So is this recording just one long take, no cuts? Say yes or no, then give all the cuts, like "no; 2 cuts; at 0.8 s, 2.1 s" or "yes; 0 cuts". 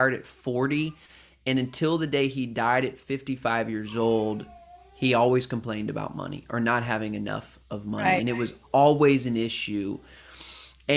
yes; 0 cuts